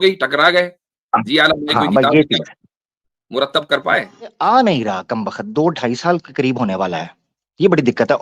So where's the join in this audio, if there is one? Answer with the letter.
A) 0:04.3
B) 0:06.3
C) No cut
A